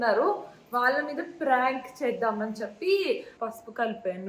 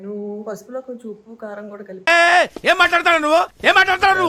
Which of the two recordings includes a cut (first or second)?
first